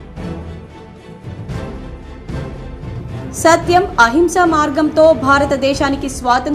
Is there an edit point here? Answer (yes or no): yes